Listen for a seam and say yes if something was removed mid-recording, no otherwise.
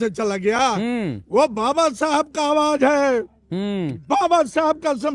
no